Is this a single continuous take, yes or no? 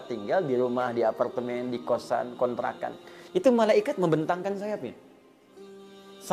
yes